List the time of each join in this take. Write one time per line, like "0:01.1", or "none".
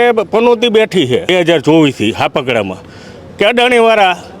0:01.3